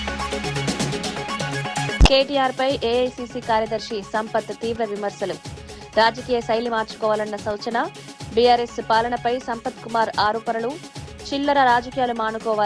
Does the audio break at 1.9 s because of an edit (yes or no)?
yes